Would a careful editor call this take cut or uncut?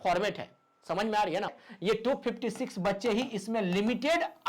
cut